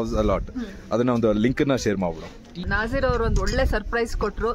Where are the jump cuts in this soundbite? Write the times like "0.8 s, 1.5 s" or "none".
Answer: 2.7 s